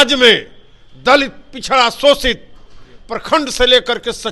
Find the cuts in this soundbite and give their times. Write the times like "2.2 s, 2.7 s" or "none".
none